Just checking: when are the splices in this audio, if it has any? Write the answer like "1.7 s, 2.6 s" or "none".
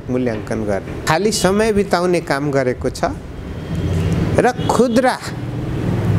1.1 s